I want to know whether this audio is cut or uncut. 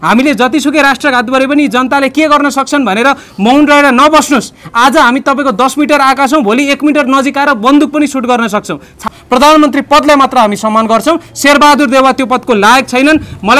cut